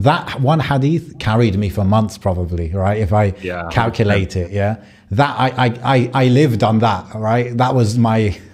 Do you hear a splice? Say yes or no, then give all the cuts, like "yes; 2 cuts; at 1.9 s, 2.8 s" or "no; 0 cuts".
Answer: no; 0 cuts